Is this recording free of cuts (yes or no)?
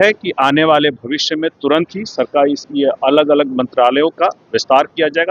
yes